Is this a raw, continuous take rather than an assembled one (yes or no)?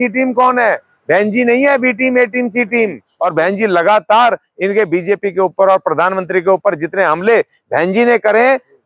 no